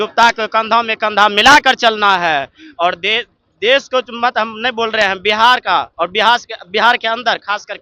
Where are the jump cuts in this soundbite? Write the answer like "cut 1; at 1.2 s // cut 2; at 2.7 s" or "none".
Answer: none